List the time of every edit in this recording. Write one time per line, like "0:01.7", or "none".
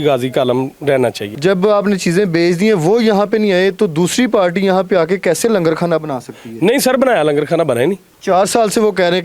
0:01.3